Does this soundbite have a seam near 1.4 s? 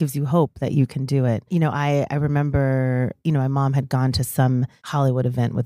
yes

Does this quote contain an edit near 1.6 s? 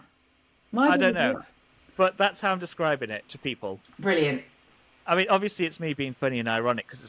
no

